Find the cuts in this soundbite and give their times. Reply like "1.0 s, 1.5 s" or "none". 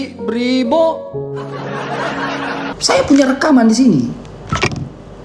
2.7 s